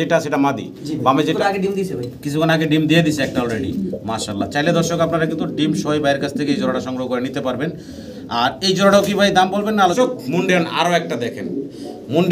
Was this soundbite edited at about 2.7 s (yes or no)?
no